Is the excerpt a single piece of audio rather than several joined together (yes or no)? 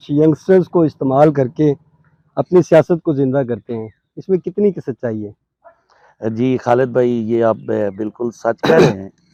yes